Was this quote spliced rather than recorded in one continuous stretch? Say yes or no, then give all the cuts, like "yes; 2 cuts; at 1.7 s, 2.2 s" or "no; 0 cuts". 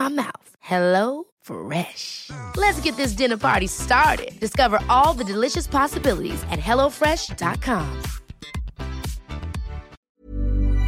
yes; 1 cut; at 9.9 s